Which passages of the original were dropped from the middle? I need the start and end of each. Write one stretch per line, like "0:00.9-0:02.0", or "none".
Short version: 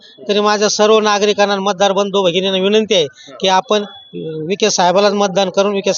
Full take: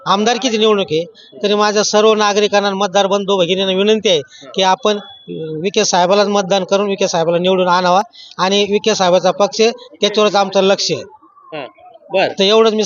none